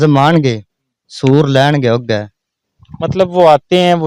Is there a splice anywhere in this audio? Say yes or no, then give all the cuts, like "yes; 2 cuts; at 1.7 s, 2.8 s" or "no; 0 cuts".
no; 0 cuts